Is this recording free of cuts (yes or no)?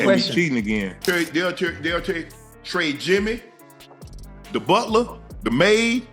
no